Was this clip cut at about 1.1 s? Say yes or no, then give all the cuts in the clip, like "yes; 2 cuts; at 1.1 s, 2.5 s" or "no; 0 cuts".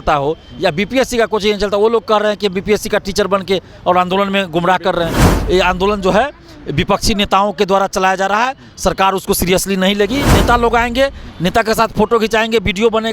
no; 2 cuts; at 5.2 s, 10.4 s